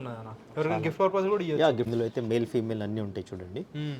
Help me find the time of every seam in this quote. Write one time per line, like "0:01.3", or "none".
0:01.9